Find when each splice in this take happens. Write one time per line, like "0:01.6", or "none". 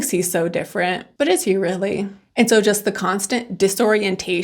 0:02.2

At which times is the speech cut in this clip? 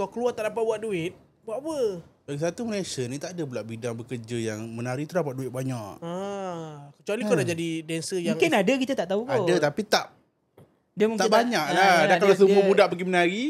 none

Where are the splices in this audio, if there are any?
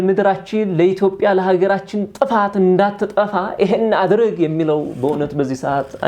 none

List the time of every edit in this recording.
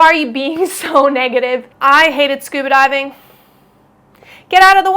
0:01.7

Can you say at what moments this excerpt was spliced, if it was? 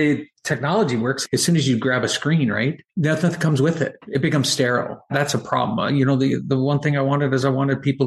0:01.2
0:02.8
0:04.0
0:05.1

